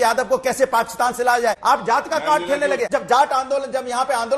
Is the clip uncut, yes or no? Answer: no